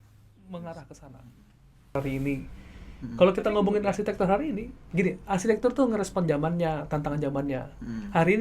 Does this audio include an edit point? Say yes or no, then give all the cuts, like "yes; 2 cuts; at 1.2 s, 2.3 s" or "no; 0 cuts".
yes; 1 cut; at 2.0 s